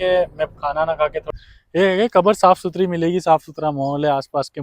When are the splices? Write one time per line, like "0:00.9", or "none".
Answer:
0:01.3